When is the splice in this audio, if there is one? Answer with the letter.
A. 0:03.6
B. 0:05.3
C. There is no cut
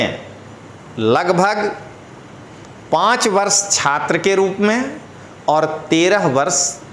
C